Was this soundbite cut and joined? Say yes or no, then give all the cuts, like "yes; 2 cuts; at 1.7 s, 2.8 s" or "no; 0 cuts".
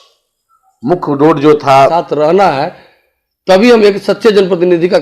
yes; 1 cut; at 1.9 s